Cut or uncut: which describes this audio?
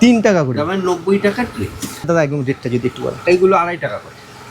cut